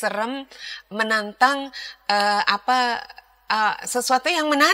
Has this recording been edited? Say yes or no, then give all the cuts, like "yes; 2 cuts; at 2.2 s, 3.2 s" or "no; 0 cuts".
no; 0 cuts